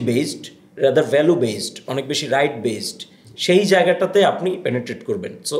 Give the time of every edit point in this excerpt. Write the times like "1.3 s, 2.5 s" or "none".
none